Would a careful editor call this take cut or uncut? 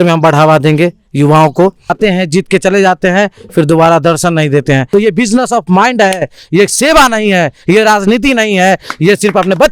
cut